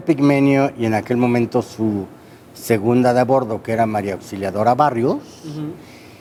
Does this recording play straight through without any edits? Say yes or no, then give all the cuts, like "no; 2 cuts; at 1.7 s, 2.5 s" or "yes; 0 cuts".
yes; 0 cuts